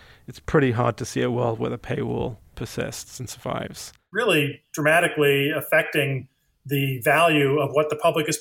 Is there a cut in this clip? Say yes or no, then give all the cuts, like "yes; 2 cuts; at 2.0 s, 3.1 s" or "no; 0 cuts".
yes; 1 cut; at 4.1 s